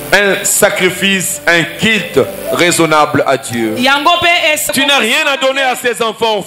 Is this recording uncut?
no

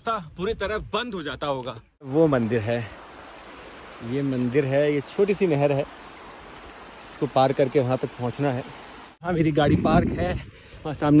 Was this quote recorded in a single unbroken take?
no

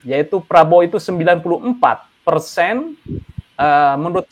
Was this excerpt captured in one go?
yes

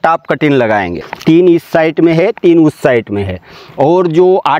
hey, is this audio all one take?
no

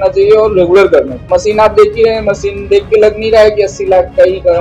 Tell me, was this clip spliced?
yes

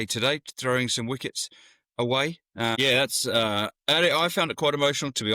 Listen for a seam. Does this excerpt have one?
yes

